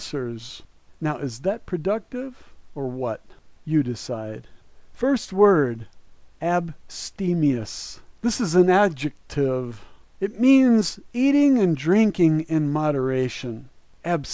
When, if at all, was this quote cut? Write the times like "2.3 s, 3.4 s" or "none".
7.8 s